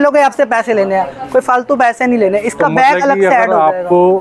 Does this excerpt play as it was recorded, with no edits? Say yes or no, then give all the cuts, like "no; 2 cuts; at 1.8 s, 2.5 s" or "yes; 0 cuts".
yes; 0 cuts